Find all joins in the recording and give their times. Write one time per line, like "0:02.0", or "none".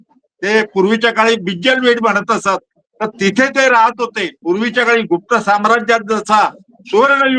0:04.3